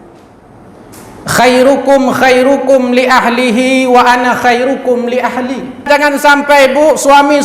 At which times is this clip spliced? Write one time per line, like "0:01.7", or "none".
0:05.9